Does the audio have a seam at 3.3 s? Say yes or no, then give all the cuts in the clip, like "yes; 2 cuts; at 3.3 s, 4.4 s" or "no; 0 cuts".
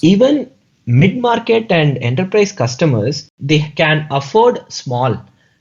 yes; 1 cut; at 3.3 s